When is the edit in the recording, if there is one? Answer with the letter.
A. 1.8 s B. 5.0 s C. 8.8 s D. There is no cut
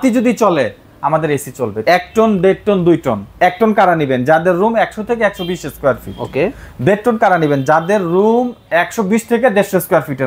A